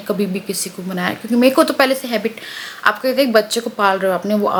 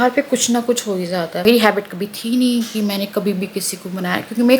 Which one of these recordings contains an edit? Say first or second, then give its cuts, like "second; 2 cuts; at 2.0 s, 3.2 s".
second; 1 cut; at 1.4 s